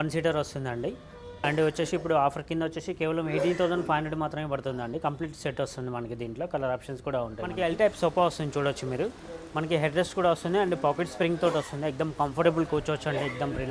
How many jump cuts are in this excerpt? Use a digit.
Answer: 2